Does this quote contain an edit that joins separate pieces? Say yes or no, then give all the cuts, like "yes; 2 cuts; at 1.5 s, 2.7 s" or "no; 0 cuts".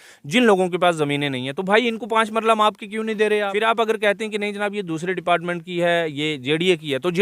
yes; 1 cut; at 3.7 s